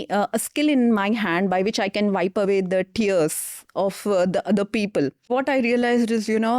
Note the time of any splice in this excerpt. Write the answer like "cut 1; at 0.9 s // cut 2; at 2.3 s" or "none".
cut 1; at 5.2 s